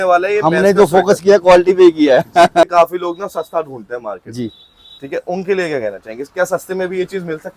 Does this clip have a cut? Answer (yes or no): yes